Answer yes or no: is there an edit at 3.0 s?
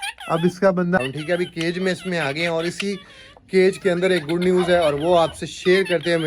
no